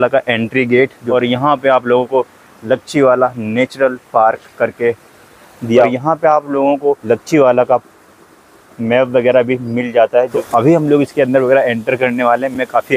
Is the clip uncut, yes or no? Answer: no